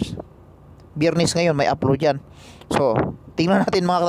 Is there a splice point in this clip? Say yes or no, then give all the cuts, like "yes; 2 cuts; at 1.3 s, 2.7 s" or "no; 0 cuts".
no; 0 cuts